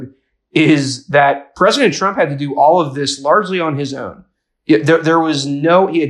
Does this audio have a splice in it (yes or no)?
no